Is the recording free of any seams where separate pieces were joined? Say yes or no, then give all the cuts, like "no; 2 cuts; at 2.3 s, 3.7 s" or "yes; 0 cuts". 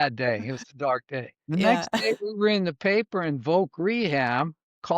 no; 1 cut; at 1.4 s